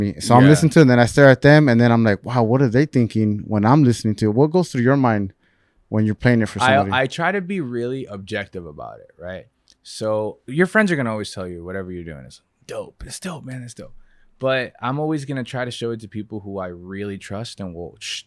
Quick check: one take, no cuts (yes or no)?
no